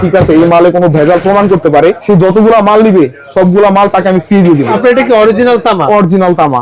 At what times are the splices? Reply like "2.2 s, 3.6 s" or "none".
2.0 s, 4.8 s

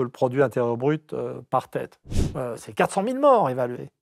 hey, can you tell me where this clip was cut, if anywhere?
2.0 s

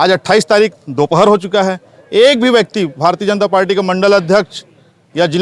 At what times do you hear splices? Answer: none

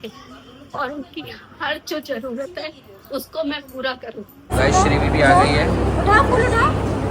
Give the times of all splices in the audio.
4.5 s

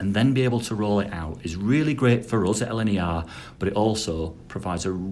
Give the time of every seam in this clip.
none

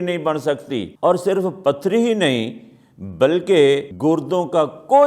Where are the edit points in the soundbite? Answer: 0.9 s, 3.9 s

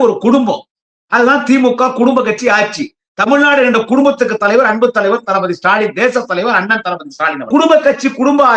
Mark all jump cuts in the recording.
7.5 s

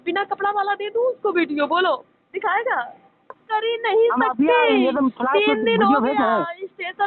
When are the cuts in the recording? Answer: 3.4 s

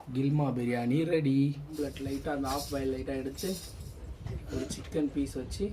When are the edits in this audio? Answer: 1.7 s

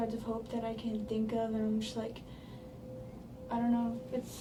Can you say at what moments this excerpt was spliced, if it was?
none

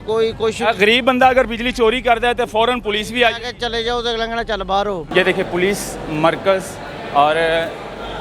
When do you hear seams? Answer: 5.0 s

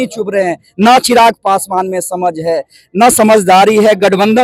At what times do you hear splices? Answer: none

